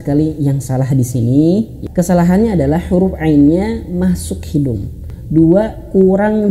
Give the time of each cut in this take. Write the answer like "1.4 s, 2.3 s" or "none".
1.8 s, 5.1 s